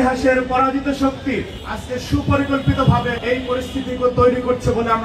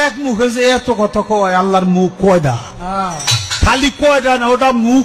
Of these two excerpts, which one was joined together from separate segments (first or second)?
first